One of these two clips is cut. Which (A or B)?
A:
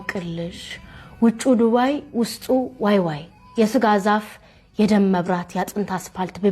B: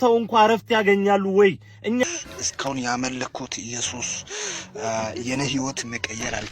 B